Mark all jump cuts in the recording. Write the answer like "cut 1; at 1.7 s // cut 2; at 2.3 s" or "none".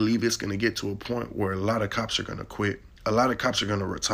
cut 1; at 2.9 s